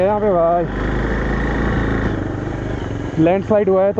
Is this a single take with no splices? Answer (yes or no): yes